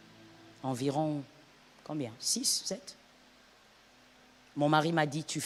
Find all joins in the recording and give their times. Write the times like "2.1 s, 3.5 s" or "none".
none